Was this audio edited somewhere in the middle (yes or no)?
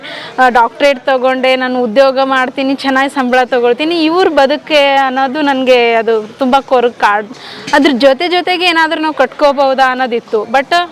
no